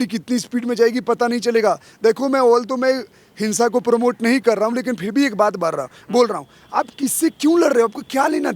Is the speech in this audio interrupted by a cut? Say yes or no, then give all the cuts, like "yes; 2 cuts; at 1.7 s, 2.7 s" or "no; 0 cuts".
no; 0 cuts